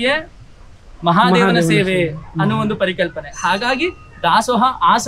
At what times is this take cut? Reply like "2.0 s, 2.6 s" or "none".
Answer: none